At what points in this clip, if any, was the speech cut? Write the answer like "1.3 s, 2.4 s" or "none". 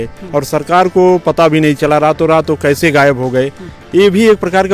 none